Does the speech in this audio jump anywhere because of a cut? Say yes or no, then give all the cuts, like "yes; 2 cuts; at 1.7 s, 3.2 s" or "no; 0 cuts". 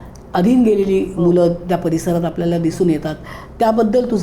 no; 0 cuts